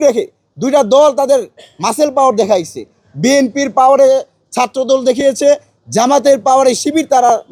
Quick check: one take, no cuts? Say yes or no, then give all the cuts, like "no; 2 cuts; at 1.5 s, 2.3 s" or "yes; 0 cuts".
yes; 0 cuts